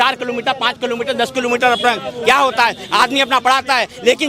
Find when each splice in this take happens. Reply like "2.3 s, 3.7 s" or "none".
none